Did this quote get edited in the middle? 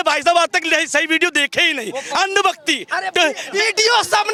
no; 0 cuts

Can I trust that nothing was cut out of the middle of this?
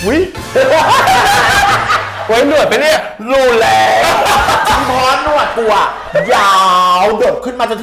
yes; 0 cuts

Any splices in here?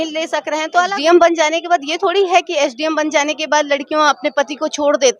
yes; 1 cut; at 0.9 s

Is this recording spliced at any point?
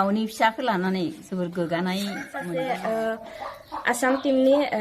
yes; 1 cut; at 2.3 s

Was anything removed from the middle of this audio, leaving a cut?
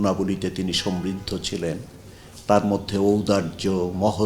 no; 0 cuts

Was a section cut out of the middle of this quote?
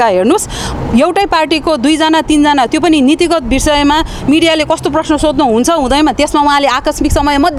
no; 0 cuts

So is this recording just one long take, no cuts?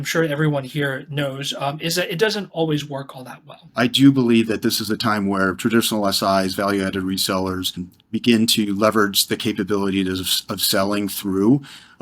no; 2 cuts; at 3.6 s, 7.9 s

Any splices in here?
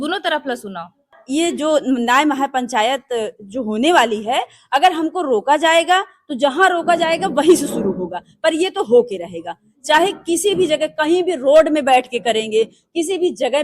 yes; 1 cut; at 1.2 s

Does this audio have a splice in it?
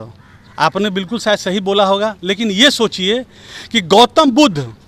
no; 0 cuts

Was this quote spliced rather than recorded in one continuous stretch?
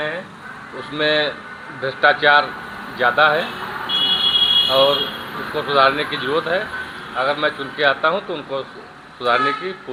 no; 0 cuts

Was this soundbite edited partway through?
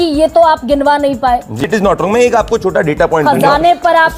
yes; 1 cut; at 1.6 s

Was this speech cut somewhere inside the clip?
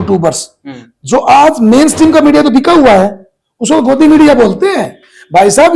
no; 0 cuts

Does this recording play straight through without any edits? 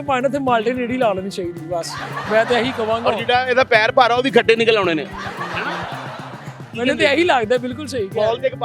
yes; 0 cuts

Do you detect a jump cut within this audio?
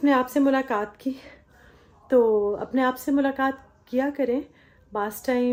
no; 0 cuts

